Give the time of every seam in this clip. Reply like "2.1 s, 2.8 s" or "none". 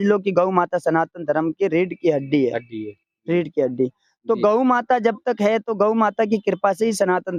none